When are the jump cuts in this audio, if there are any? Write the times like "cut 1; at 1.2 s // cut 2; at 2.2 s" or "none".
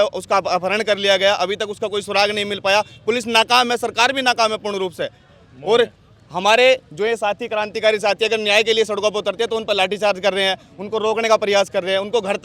none